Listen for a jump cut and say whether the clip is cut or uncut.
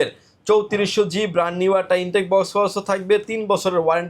uncut